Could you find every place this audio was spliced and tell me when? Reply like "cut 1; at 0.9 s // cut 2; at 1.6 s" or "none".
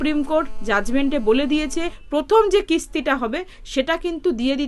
cut 1; at 2.0 s